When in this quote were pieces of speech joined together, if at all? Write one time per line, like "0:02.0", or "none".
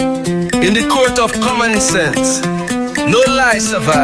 none